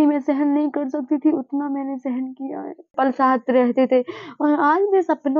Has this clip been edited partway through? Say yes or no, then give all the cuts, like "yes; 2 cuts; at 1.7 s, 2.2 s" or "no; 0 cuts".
yes; 1 cut; at 2.9 s